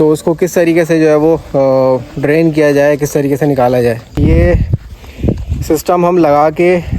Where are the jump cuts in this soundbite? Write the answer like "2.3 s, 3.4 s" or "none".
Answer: 4.2 s